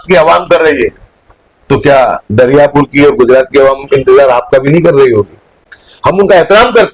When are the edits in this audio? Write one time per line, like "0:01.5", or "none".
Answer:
none